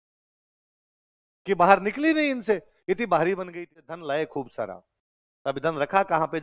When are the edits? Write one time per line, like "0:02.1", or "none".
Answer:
0:03.8